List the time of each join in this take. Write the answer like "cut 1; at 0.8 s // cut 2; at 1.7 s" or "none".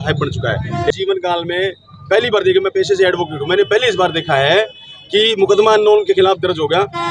cut 1; at 0.9 s